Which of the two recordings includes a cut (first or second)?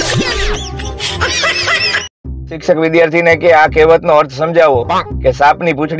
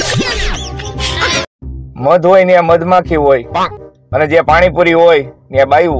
first